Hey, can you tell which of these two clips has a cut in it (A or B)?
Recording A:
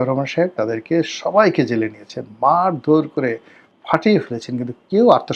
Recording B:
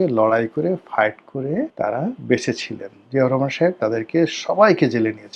B